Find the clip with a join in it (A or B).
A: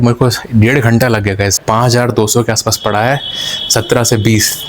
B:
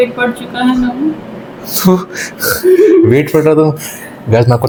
A